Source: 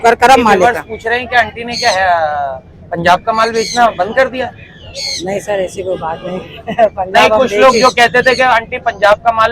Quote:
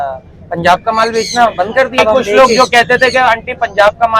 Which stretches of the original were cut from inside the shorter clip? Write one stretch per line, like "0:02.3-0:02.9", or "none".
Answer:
0:04.4-0:07.2